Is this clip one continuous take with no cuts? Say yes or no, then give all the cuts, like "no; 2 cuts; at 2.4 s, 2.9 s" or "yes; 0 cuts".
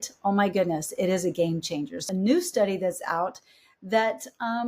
no; 1 cut; at 2.0 s